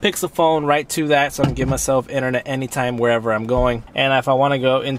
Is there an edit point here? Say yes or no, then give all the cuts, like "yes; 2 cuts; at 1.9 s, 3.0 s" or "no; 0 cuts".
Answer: yes; 1 cut; at 3.8 s